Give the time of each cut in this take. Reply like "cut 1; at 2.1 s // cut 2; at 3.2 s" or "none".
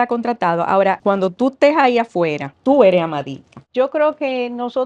cut 1; at 3.5 s